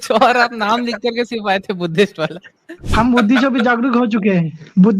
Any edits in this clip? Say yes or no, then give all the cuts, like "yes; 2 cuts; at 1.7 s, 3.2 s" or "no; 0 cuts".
yes; 1 cut; at 2.8 s